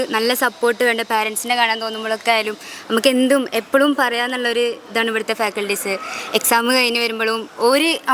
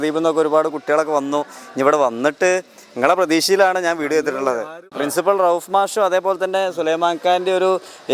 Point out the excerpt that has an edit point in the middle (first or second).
second